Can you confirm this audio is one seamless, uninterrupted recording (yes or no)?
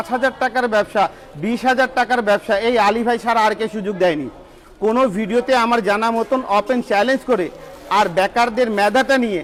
yes